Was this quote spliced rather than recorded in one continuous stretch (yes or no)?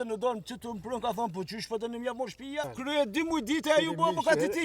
yes